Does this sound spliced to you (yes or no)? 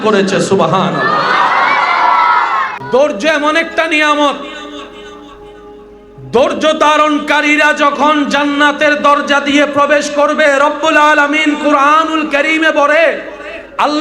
yes